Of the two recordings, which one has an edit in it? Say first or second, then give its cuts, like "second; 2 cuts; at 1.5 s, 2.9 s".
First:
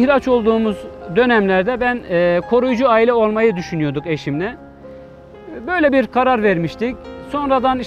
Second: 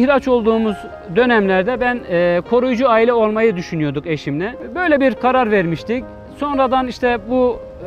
second; 1 cut; at 4.6 s